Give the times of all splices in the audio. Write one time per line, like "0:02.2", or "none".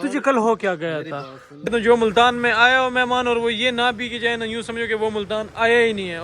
0:01.7